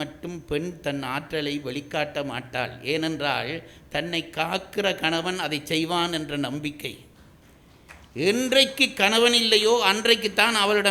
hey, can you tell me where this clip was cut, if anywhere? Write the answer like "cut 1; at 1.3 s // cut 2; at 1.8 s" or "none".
none